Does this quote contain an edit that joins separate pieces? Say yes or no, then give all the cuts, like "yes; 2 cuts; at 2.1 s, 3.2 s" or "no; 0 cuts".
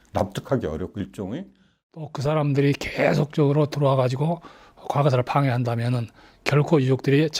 yes; 1 cut; at 2.1 s